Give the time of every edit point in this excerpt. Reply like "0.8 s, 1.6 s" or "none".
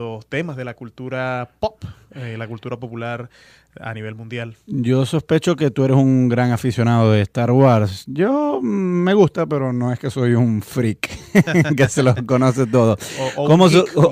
3.7 s